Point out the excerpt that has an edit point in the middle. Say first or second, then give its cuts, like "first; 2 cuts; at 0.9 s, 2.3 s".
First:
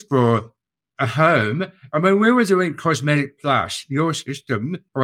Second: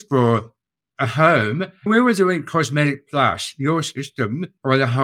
second; 1 cut; at 1.9 s